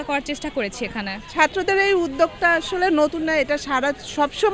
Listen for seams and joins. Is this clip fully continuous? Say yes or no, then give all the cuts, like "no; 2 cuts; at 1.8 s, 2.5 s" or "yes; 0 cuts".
no; 1 cut; at 1.2 s